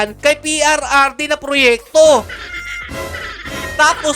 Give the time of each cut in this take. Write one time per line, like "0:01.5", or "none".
none